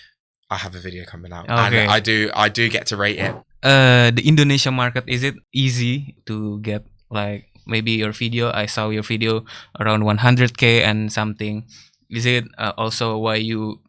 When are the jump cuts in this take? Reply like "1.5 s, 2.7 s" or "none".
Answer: 3.3 s, 5.4 s, 6.2 s